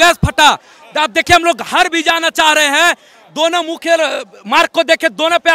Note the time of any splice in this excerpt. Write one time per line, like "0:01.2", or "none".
none